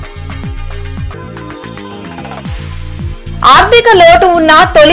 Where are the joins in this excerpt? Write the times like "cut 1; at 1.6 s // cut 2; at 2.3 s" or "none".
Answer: cut 1; at 1.1 s // cut 2; at 3.1 s